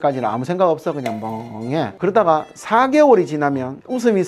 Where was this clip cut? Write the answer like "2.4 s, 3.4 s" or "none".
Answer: 1.9 s